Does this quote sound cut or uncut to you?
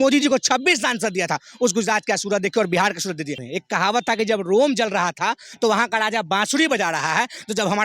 cut